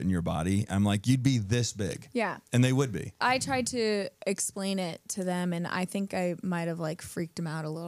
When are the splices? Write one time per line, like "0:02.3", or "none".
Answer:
0:03.1